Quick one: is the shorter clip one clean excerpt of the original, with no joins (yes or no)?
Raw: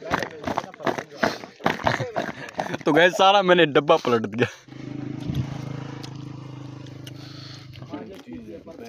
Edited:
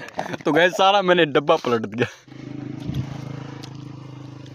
yes